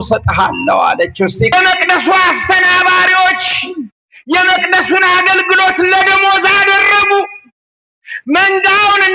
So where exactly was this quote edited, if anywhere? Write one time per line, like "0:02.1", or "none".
0:01.5